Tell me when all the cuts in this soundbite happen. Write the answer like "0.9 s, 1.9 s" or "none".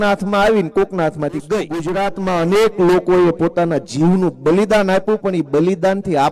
1.9 s